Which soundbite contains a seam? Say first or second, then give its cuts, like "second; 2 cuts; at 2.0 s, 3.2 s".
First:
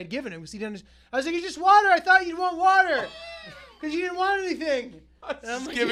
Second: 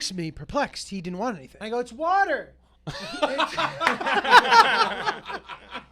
second; 1 cut; at 1.5 s